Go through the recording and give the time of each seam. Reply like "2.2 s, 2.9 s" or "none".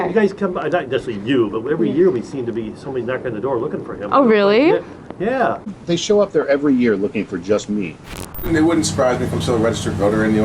5.8 s, 8.3 s